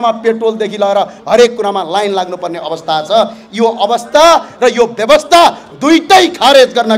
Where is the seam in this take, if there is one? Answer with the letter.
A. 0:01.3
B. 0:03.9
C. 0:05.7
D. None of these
D